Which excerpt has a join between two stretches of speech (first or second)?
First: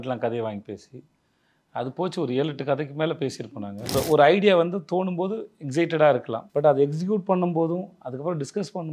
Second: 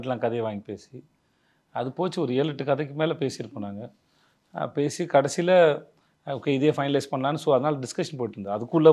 first